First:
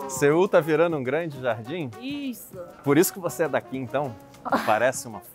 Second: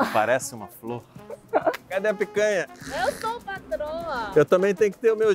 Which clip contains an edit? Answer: second; 3 cuts; at 1.8 s, 2.8 s, 4.3 s

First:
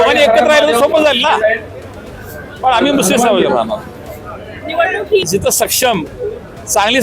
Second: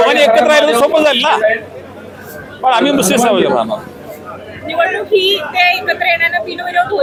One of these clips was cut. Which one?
first; 1 cut; at 5.2 s

